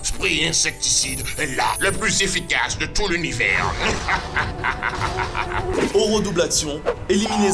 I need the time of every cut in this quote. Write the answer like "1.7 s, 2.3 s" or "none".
none